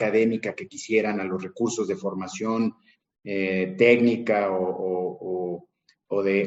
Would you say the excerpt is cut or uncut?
uncut